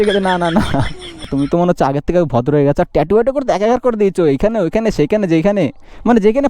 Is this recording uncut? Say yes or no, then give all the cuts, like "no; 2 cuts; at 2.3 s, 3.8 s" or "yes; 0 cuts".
no; 1 cut; at 1.3 s